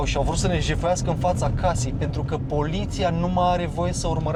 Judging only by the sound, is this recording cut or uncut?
uncut